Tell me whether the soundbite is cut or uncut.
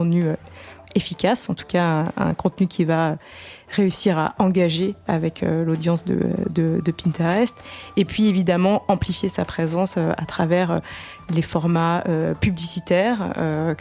uncut